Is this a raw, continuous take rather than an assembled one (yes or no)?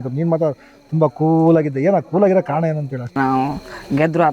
no